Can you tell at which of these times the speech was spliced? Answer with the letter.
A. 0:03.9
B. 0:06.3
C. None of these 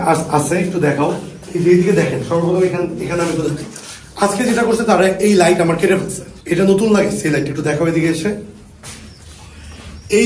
C